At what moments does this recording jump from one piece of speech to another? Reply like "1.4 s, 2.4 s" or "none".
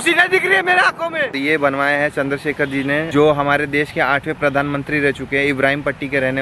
1.3 s, 3.1 s